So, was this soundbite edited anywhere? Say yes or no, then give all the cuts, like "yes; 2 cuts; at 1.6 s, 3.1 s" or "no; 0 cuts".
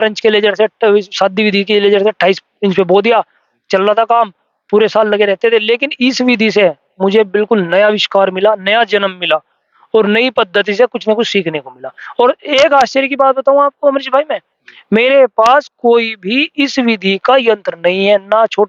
no; 0 cuts